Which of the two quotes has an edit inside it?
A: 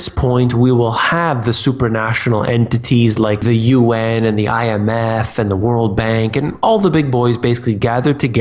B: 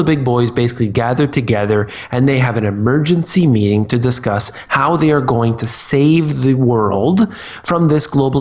A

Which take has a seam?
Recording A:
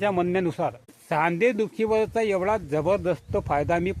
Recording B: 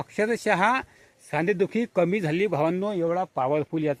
A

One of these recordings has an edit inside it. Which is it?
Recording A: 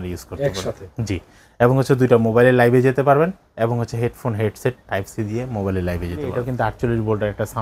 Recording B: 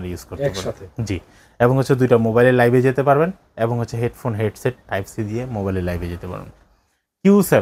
A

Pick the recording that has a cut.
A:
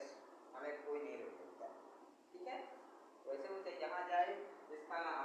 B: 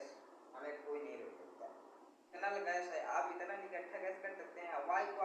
B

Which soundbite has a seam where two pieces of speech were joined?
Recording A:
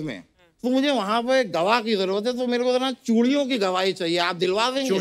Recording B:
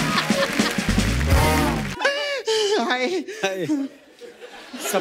B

